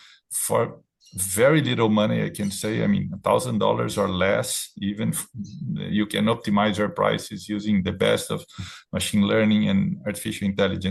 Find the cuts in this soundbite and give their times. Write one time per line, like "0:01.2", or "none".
none